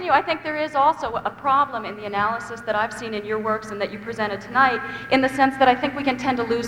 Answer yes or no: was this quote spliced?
no